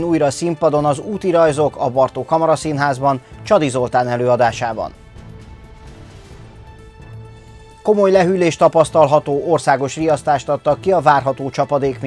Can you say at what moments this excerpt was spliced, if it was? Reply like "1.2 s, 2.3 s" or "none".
none